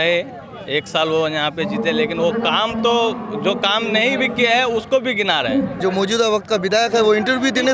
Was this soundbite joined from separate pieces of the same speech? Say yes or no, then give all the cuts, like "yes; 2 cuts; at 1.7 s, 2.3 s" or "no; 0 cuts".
yes; 1 cut; at 5.8 s